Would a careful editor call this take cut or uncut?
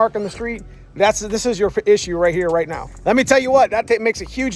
cut